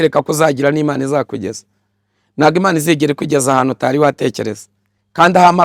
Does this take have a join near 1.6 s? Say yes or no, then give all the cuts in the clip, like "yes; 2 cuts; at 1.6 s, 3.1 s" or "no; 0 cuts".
no; 0 cuts